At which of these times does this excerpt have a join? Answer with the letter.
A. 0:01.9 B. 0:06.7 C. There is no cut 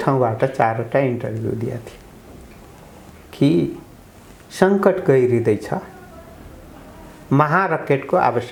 C